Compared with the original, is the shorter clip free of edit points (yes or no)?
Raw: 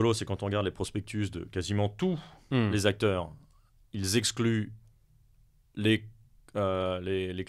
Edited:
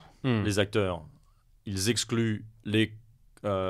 no